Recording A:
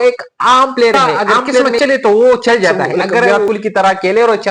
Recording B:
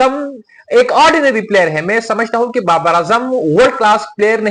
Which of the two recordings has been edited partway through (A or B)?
A